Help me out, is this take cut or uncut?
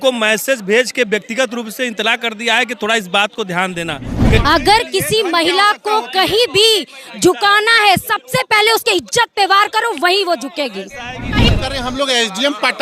cut